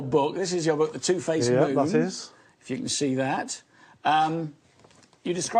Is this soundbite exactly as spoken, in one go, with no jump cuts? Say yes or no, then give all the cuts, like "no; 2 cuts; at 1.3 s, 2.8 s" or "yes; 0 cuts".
yes; 0 cuts